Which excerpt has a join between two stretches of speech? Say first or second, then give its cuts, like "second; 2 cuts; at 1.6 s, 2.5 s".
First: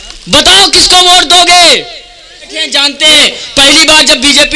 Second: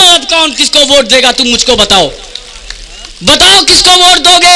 first; 1 cut; at 2.7 s